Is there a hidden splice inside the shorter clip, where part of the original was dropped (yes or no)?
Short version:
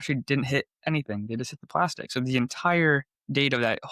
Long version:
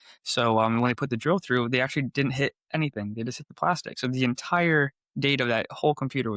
no